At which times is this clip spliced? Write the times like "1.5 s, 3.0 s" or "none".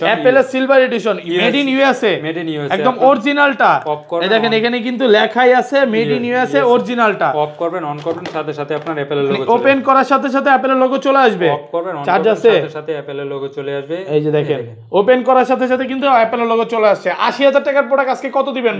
none